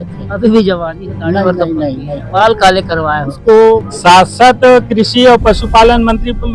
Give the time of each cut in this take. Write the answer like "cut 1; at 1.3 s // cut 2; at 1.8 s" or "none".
cut 1; at 3.9 s